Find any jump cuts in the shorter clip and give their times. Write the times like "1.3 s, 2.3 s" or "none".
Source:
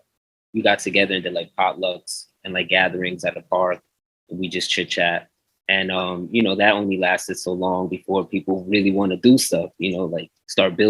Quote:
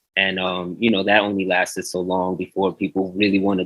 none

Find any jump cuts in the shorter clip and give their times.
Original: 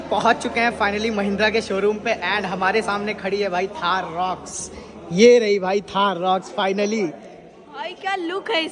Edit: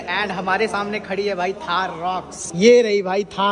2.4 s

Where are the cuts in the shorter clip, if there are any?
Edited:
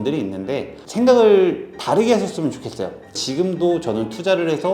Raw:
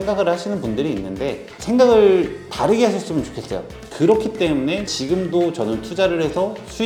3.1 s

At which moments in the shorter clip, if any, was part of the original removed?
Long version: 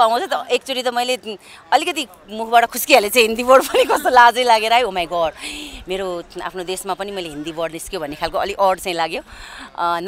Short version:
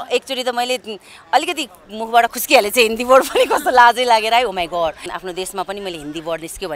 5.0 s

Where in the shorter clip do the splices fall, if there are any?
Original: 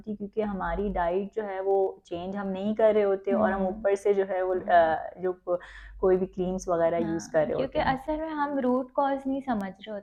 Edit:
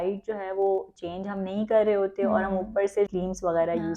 3.1 s

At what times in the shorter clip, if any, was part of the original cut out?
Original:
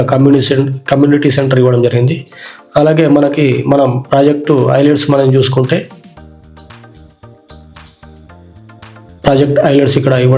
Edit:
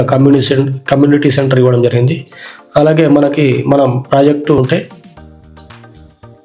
4.6 s

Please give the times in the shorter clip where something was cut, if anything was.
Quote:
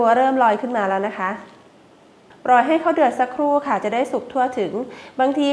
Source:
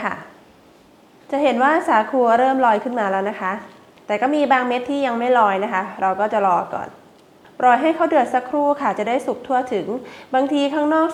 1.7 s

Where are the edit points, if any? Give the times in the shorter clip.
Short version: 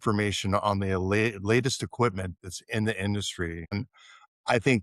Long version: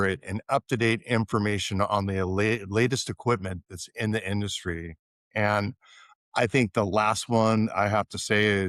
3.7 s

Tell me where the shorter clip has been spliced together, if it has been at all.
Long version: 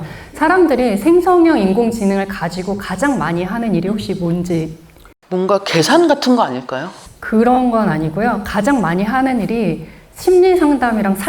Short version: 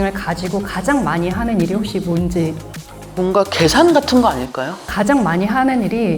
4.9 s

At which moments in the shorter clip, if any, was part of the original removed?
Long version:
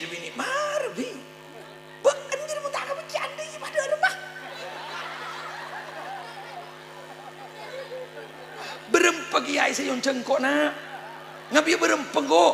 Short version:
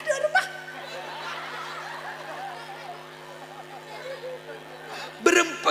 none

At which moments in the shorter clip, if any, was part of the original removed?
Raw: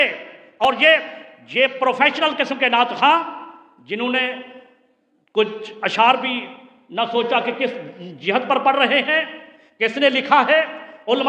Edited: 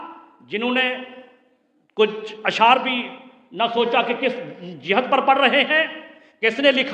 none

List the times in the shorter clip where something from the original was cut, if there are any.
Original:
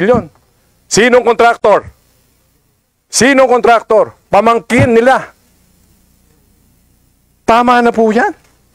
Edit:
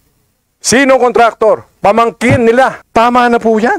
2.8 s

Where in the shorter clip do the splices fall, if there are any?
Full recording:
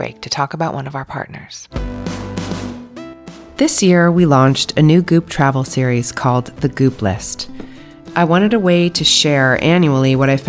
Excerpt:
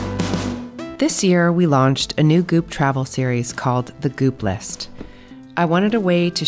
0.9 s

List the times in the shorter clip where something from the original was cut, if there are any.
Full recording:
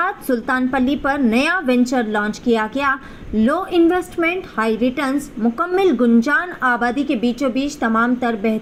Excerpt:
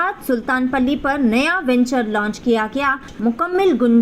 3.1 s

